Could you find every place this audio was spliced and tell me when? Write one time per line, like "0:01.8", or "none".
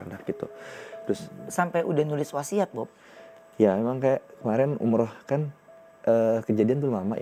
0:01.3